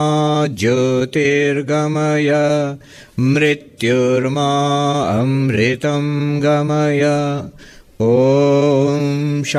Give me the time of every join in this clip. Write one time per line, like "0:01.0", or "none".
none